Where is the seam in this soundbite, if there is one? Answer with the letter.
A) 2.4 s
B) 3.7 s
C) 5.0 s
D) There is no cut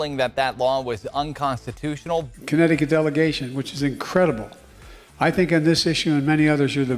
A